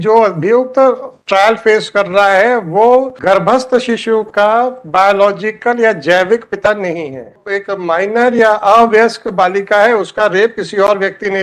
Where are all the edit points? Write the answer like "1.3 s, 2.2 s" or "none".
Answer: 3.1 s, 7.5 s